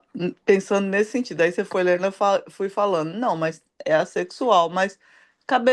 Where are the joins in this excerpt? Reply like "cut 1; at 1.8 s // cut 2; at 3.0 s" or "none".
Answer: none